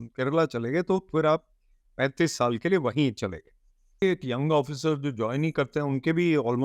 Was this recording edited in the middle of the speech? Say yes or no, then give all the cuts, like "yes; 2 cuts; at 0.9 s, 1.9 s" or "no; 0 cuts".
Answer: yes; 1 cut; at 4.0 s